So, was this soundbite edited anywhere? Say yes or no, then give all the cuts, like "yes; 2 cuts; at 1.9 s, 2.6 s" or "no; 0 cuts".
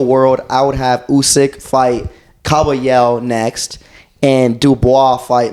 no; 0 cuts